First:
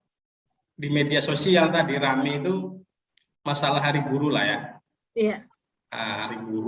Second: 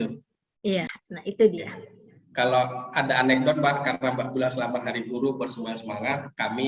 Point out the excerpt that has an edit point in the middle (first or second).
second